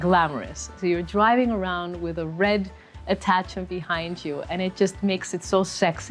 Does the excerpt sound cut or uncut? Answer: uncut